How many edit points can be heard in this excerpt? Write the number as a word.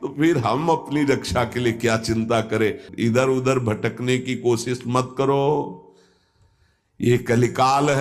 one